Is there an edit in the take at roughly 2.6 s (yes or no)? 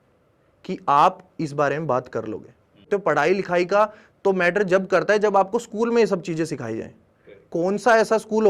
no